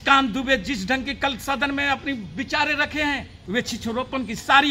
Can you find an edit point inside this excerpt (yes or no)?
yes